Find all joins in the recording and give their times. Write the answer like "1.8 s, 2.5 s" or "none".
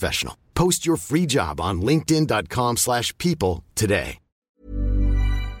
4.5 s

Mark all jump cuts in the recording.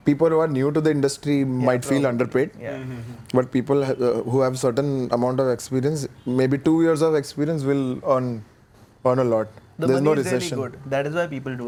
none

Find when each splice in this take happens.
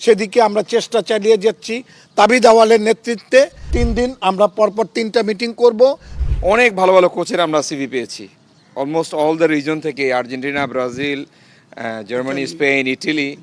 3.7 s, 6.1 s

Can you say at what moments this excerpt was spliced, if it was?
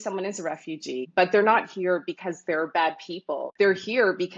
1.1 s, 3.5 s

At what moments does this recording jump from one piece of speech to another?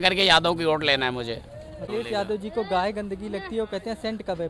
1.8 s

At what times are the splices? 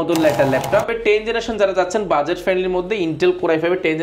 1.0 s

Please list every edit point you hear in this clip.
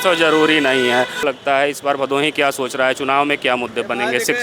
none

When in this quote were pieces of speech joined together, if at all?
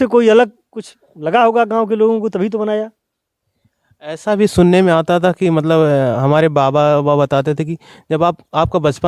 none

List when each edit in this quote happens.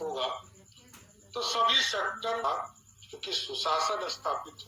2.4 s

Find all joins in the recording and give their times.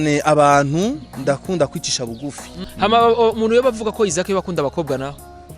2.6 s

